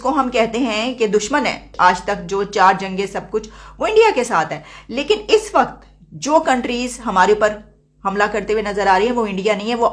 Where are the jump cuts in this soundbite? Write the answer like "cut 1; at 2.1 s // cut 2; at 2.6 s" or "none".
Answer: none